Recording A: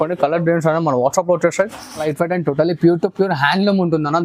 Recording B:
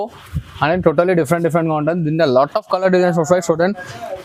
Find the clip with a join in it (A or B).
A